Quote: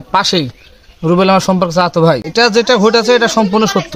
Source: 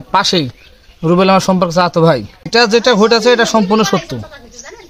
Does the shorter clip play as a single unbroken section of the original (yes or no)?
no